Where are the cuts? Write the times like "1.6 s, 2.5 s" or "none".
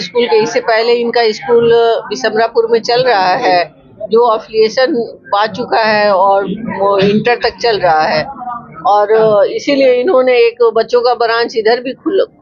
none